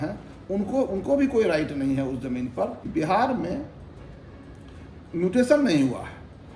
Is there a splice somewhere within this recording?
yes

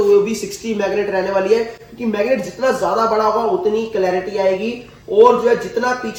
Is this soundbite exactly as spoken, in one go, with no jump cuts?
yes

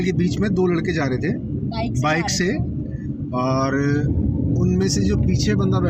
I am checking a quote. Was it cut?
no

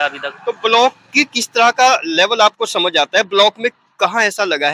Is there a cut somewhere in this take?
no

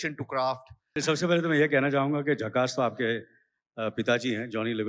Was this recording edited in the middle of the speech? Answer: yes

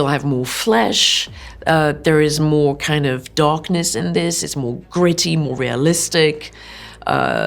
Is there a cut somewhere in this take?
no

